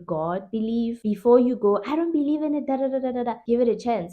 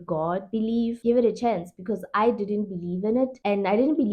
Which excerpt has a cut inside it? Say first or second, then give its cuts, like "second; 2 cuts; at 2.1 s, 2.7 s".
second; 1 cut; at 1.0 s